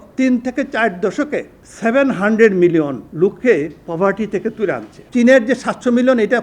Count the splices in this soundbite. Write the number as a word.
three